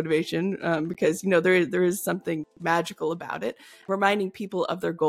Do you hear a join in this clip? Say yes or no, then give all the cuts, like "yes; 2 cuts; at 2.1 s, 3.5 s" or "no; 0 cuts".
yes; 1 cut; at 3.7 s